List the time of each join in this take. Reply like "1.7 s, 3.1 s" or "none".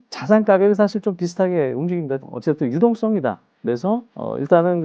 2.3 s